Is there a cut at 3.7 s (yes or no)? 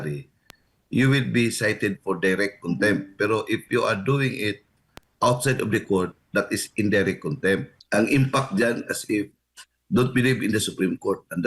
no